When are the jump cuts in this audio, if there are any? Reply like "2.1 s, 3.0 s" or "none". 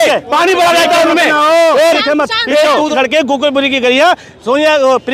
2.9 s